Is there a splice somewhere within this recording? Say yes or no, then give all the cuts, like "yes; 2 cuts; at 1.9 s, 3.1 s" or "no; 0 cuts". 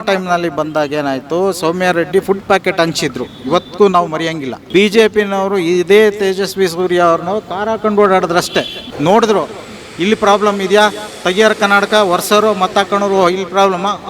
yes; 2 cuts; at 4.5 s, 8.8 s